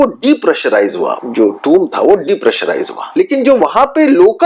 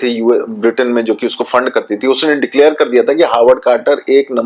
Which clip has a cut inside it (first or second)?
first